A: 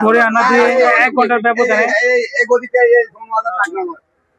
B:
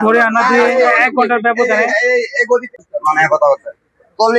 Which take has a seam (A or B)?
B